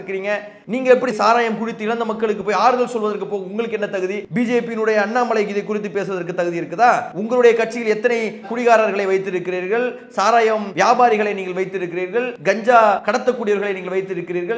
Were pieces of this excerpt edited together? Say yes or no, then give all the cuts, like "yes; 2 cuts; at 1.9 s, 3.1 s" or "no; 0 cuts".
yes; 4 cuts; at 4.2 s, 7.1 s, 12.3 s, 13.0 s